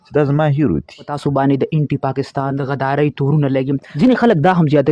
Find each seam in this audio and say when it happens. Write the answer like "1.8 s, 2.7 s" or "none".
1.1 s, 2.6 s, 3.9 s